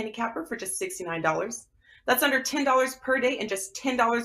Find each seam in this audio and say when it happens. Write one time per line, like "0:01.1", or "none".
0:02.2